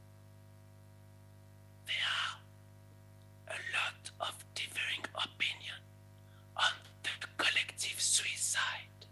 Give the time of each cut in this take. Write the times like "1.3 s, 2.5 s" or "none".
1.9 s